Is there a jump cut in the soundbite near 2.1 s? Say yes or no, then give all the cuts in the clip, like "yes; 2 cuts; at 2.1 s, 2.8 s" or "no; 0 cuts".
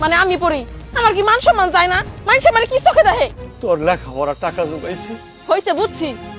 no; 1 cut; at 3.5 s